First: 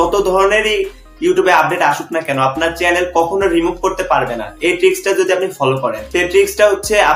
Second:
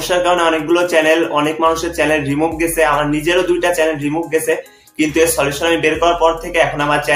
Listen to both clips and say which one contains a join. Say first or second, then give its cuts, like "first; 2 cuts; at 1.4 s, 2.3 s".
first; 1 cut; at 6.0 s